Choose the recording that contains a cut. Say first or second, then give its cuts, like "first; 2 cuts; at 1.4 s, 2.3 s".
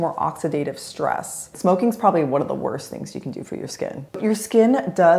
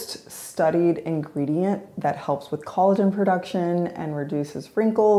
first; 2 cuts; at 1.4 s, 4.1 s